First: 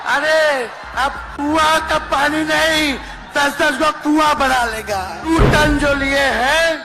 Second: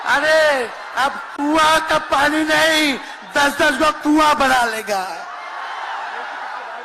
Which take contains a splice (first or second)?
first